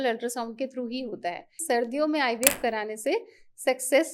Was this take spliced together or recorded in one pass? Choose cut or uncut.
cut